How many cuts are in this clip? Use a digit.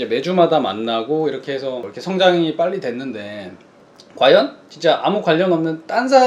1